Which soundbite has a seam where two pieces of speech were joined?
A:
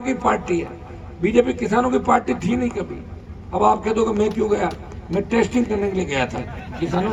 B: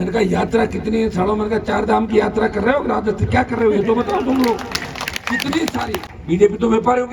B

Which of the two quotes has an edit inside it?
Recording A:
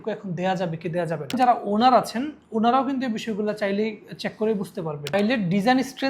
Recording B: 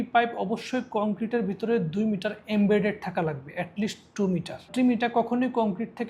A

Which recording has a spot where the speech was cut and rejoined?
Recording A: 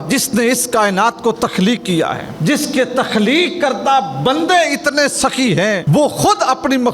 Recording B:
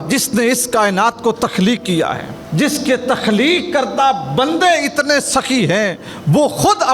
A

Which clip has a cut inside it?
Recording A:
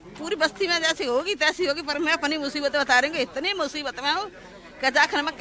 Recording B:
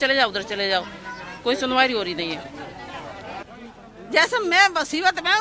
B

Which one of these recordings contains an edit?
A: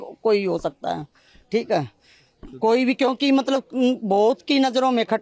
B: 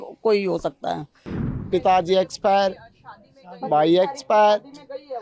B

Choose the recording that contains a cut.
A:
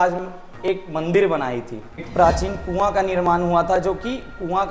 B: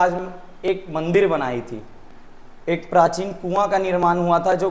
A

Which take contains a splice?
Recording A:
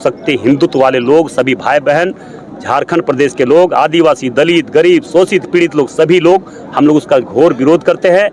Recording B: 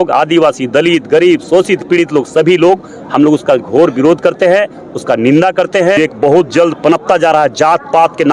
B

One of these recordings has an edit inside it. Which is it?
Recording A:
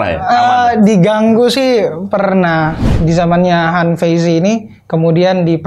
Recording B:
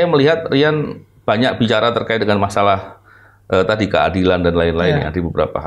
A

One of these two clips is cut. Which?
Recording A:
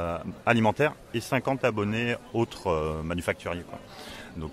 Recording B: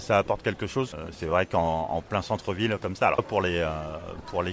B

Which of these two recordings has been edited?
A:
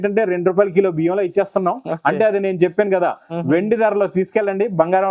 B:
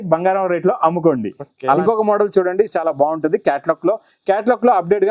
B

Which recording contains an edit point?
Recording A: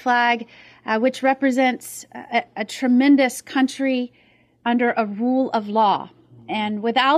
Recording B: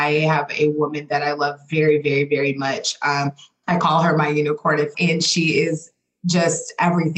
B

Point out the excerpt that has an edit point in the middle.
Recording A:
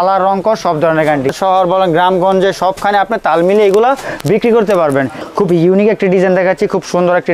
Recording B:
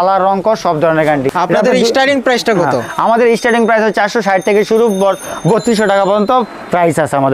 A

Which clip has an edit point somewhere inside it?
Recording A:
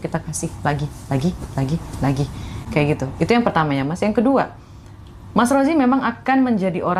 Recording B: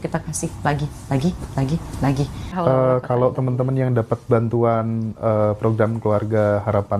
B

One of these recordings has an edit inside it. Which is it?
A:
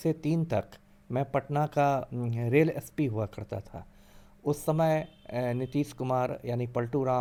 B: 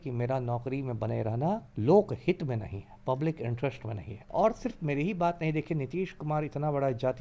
B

